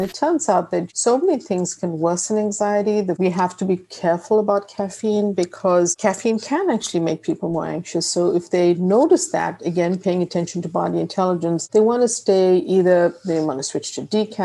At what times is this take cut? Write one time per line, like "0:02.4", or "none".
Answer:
0:00.9
0:03.2